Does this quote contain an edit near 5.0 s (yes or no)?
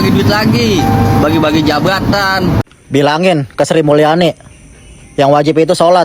no